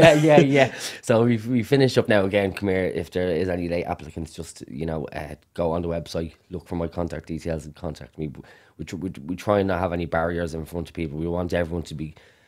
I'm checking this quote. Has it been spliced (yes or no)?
no